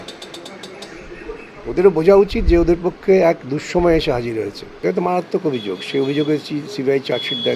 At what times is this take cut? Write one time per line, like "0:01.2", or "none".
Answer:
0:04.8